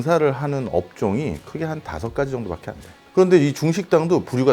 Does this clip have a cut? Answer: yes; 1 cut; at 2.9 s

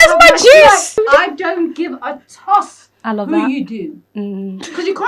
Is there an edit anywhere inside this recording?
yes; 1 cut; at 1.0 s

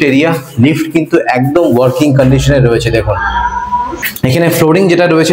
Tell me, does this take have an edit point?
yes; 1 cut; at 4.0 s

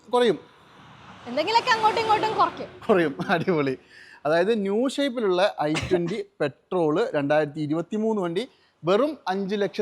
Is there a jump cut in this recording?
no; 0 cuts

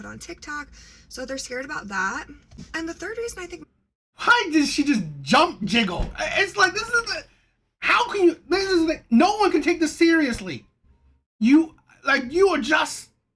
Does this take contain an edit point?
no; 0 cuts

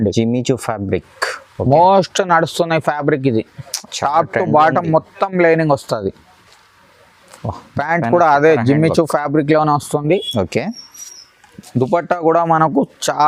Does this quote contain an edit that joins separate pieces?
no; 0 cuts

